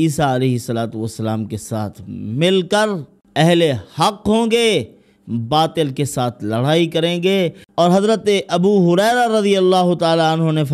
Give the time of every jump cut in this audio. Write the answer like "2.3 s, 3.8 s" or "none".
3.1 s, 7.6 s